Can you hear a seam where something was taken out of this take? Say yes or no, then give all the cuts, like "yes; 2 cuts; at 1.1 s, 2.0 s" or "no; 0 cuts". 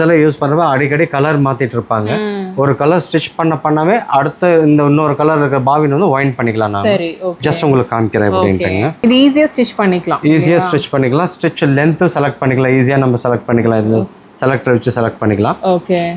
no; 0 cuts